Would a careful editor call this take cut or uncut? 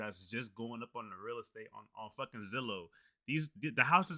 uncut